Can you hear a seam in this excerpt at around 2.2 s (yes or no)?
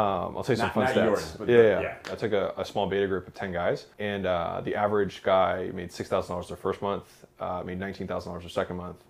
yes